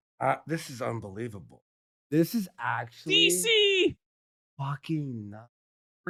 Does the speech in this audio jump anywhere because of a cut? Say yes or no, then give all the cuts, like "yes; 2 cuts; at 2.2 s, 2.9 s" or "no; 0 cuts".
no; 0 cuts